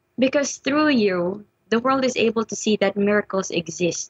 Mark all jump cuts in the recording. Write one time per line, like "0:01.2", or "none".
0:01.4